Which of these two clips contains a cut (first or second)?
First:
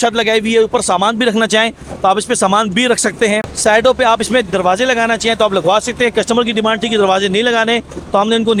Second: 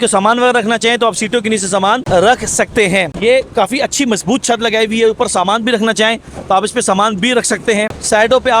second